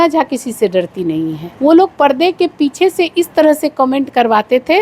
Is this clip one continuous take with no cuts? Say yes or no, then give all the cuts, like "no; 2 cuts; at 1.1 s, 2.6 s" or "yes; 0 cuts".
no; 1 cut; at 1.4 s